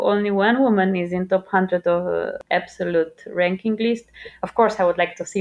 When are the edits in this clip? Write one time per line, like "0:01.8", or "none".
0:02.4